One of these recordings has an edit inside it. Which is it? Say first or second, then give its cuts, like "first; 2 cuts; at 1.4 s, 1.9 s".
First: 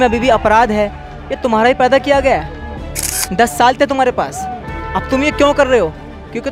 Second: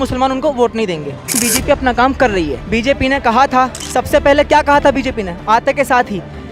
second; 3 cuts; at 1.4 s, 2.6 s, 3.8 s